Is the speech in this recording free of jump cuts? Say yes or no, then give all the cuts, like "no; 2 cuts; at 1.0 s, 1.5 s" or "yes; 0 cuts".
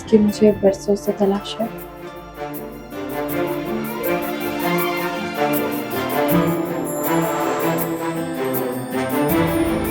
yes; 0 cuts